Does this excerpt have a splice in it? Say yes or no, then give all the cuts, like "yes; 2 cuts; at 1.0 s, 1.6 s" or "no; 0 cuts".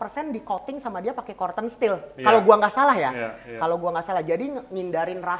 no; 0 cuts